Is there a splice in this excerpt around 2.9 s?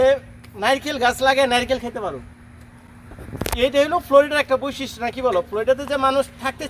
no; 0 cuts

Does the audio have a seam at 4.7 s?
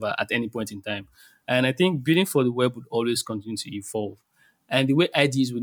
no; 0 cuts

